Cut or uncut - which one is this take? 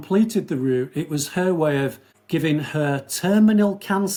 uncut